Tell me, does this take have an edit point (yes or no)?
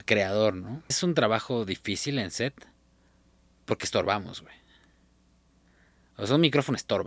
yes